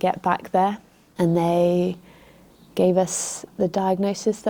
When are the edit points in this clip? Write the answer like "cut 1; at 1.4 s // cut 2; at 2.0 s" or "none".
cut 1; at 1.0 s